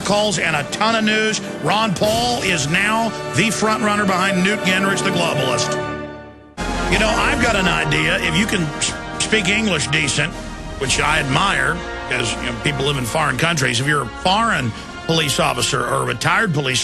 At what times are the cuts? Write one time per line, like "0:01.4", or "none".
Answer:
0:13.6